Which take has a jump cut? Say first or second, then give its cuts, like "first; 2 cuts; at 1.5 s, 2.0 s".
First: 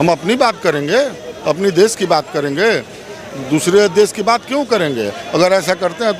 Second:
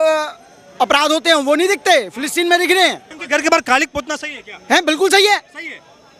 second; 1 cut; at 3.1 s